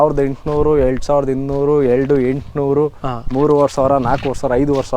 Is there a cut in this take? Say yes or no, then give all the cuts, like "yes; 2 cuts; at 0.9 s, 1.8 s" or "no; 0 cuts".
no; 0 cuts